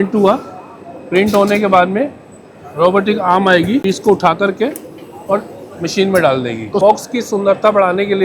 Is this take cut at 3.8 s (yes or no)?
yes